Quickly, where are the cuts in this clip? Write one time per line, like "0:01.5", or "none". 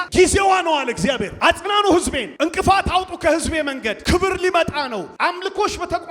0:01.3
0:02.2
0:03.9
0:05.1